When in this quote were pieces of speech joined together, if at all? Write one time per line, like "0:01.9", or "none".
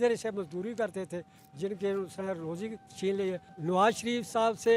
0:03.5